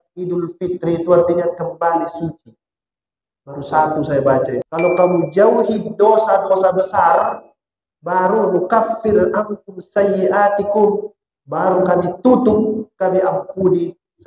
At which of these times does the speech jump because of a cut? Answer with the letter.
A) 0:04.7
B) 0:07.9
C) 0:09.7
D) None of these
A